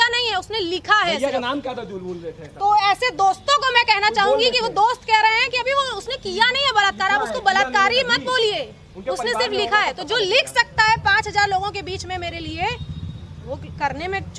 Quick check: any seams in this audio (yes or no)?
no